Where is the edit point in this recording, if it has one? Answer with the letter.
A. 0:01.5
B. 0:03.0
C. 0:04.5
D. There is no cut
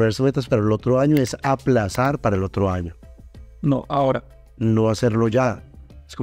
D